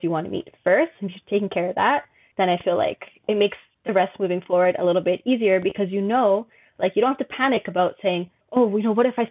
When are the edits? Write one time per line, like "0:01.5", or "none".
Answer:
0:02.2
0:03.7
0:08.3